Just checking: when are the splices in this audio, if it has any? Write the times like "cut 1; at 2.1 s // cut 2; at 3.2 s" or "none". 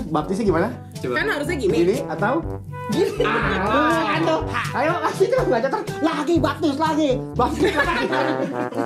none